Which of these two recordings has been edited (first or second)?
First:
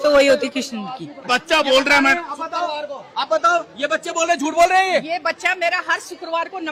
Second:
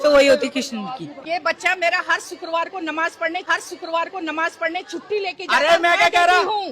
second